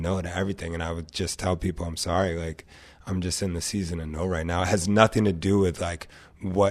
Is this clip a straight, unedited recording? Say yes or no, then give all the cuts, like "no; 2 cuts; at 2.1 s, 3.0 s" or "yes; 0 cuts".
yes; 0 cuts